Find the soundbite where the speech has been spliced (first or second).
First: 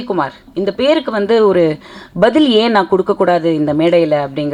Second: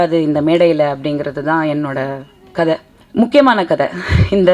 second